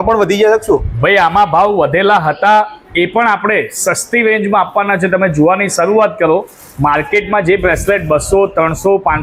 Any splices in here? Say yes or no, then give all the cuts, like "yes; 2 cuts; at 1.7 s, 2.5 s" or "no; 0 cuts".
no; 0 cuts